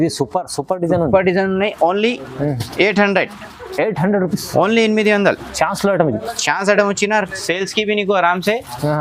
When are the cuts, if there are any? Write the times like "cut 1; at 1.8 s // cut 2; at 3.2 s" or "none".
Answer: none